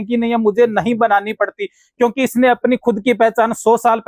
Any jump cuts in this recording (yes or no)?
no